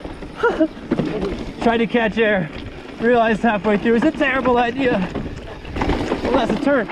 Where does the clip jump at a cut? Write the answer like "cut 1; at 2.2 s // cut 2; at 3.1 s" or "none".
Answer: cut 1; at 5.7 s